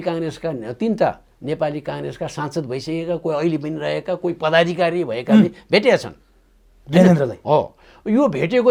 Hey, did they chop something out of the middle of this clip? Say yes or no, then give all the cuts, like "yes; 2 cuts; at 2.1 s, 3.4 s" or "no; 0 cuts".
no; 0 cuts